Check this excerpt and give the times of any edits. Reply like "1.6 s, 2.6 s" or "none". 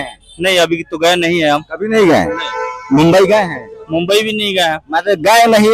none